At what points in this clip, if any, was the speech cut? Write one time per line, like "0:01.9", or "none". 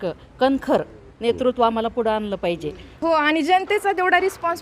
0:03.0